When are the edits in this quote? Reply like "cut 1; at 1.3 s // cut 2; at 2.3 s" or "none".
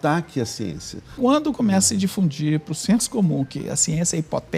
cut 1; at 1.2 s